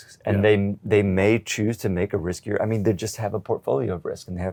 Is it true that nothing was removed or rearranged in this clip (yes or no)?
yes